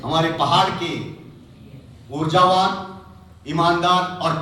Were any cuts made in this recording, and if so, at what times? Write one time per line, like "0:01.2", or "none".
none